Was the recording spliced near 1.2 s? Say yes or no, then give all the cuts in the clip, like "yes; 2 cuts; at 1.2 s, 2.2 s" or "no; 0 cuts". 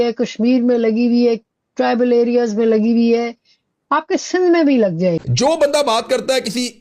no; 1 cut; at 5.2 s